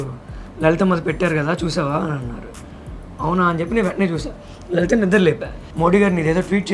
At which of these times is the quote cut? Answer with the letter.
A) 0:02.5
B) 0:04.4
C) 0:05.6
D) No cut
C